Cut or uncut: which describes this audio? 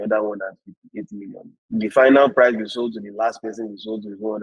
uncut